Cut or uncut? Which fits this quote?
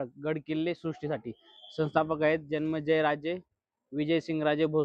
uncut